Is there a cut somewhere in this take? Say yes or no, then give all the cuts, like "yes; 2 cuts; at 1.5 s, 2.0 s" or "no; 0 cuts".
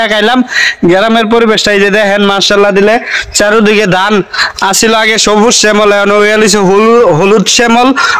no; 0 cuts